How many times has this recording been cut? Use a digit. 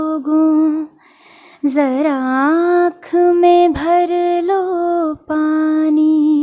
0